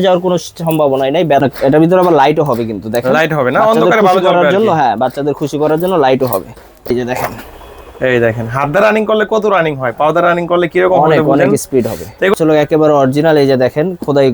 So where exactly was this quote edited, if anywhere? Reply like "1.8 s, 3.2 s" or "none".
1.4 s, 6.9 s, 12.3 s